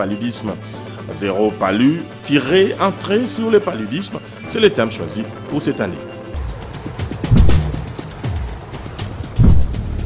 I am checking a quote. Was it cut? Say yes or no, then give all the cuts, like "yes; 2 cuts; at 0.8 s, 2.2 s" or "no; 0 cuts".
no; 0 cuts